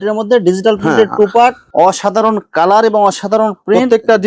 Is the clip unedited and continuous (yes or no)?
no